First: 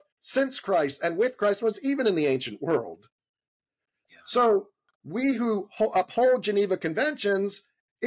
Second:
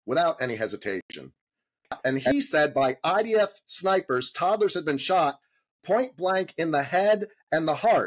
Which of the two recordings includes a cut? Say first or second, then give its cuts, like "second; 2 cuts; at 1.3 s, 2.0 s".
second; 1 cut; at 2.0 s